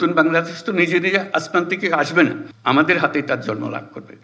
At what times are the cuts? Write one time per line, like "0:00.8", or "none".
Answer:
none